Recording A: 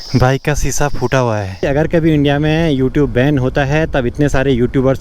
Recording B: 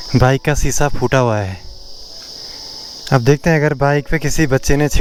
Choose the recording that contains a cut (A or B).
A